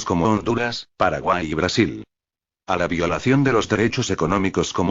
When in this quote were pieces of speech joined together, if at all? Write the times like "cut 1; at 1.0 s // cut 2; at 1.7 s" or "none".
cut 1; at 2.7 s